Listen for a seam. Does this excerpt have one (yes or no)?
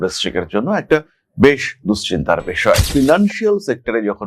yes